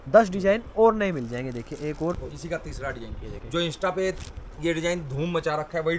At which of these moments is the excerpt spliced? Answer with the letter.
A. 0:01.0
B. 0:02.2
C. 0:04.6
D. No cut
B